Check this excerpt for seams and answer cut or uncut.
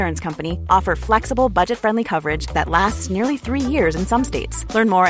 uncut